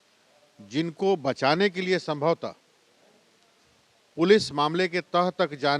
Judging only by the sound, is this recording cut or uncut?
uncut